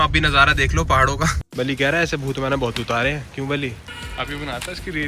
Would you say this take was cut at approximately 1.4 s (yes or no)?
yes